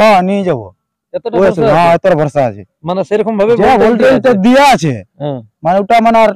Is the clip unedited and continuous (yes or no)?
yes